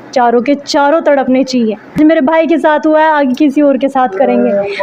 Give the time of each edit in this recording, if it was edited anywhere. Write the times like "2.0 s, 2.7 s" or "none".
2.0 s